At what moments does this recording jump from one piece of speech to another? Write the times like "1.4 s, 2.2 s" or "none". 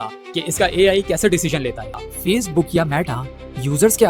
2.0 s

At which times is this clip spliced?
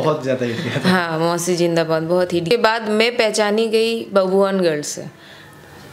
2.5 s

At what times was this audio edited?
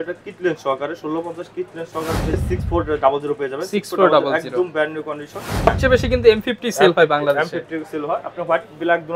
2.3 s, 5.7 s

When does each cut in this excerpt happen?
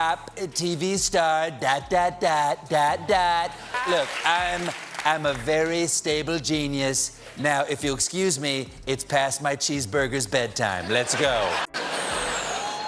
3.7 s, 11.7 s

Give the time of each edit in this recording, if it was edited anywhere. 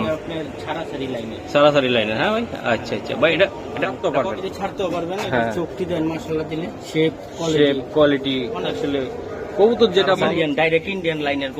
4.0 s, 10.2 s

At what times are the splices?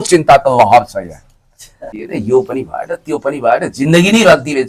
1.8 s

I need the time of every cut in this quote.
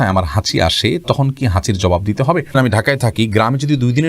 2.5 s

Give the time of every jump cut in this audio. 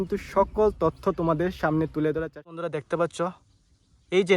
2.6 s

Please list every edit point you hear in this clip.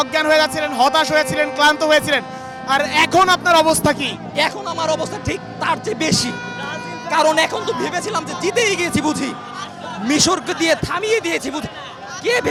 none

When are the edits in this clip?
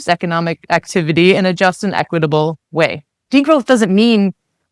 3.1 s

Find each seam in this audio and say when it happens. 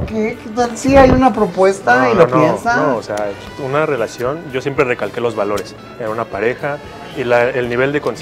none

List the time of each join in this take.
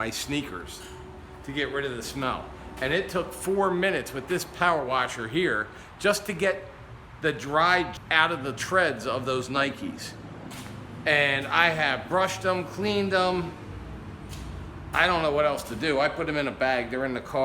8.0 s

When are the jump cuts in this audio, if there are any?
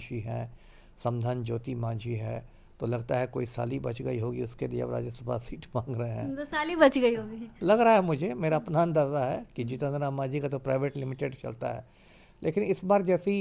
none

